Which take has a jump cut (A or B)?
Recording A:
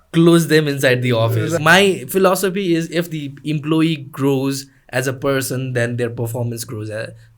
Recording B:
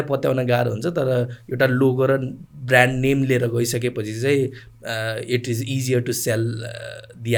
A